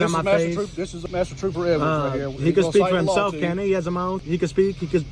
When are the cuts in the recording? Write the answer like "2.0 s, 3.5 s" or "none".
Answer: 0.9 s, 4.2 s

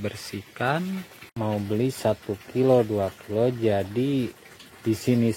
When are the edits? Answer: 1.2 s

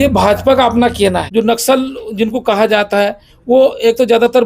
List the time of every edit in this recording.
1.2 s

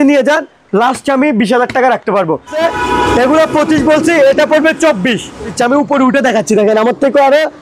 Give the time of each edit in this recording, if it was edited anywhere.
2.6 s, 5.5 s

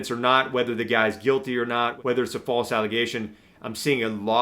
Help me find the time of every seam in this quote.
1.9 s

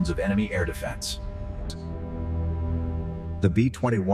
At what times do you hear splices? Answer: 1.7 s

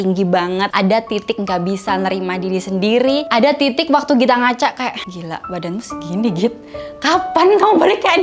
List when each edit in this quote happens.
none

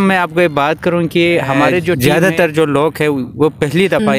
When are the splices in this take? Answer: 2.0 s

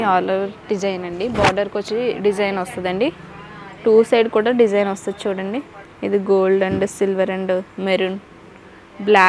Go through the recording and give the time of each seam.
none

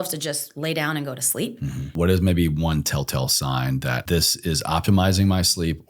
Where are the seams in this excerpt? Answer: 1.9 s, 4.0 s

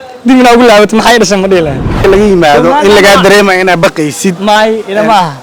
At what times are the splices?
2.0 s

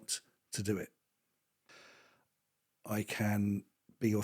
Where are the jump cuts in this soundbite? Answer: 1.7 s

